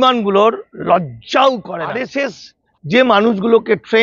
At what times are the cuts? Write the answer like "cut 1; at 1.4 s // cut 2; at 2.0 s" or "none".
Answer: cut 1; at 2.0 s